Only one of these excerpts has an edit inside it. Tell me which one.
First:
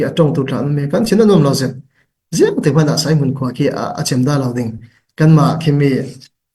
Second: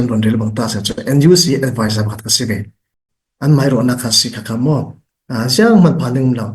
second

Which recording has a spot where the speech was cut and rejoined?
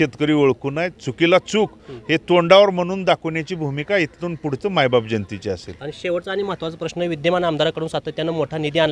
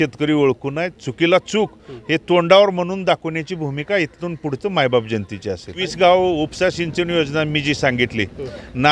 second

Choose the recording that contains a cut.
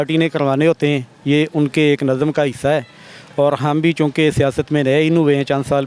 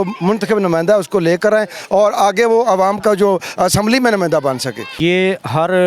second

